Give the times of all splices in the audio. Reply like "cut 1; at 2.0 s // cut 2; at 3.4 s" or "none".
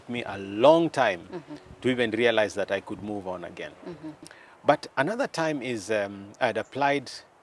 cut 1; at 4.4 s